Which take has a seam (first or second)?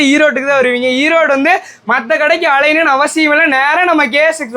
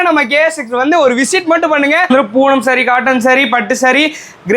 second